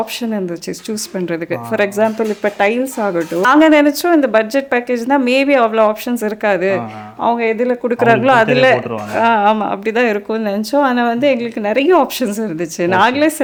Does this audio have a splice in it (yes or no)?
no